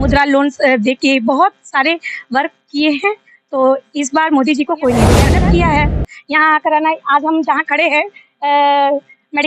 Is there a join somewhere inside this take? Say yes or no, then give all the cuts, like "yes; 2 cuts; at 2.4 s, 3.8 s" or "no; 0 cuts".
yes; 1 cut; at 5.3 s